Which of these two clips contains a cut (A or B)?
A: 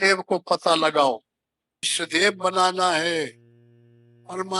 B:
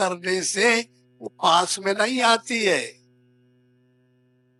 A